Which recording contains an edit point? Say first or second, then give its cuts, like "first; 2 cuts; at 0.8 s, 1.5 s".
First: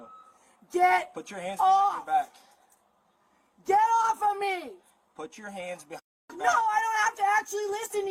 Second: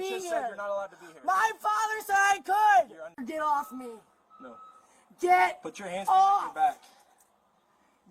second; 1 cut; at 3.1 s